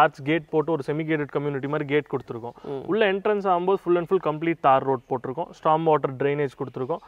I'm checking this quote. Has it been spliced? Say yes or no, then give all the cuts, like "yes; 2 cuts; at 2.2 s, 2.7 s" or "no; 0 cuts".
no; 0 cuts